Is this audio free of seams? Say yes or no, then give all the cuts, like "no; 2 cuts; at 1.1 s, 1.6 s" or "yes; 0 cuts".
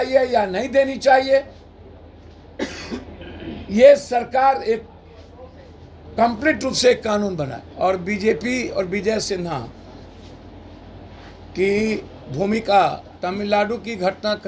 no; 1 cut; at 7.6 s